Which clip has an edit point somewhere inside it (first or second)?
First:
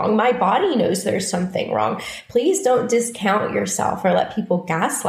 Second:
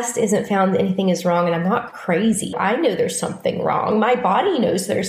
second